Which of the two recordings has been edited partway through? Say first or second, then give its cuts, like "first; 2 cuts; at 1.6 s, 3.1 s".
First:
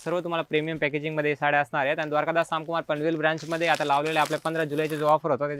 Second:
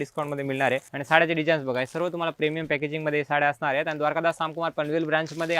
second; 1 cut; at 0.9 s